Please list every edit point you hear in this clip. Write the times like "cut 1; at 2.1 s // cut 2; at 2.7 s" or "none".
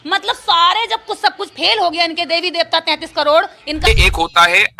cut 1; at 3.9 s